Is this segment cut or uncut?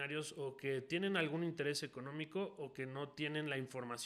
uncut